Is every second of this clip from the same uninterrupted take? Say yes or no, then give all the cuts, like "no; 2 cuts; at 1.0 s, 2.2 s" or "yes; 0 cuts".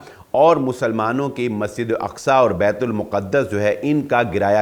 yes; 0 cuts